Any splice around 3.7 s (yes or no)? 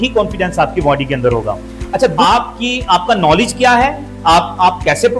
no